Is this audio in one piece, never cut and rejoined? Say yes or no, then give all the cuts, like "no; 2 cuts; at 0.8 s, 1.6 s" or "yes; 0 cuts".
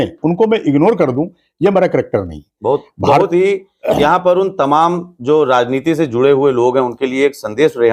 yes; 0 cuts